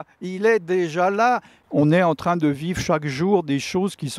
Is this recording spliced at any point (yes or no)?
yes